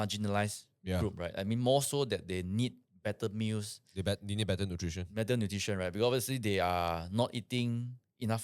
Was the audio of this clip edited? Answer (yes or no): no